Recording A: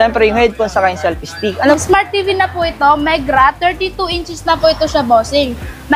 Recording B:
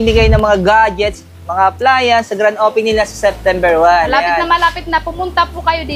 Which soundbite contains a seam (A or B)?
A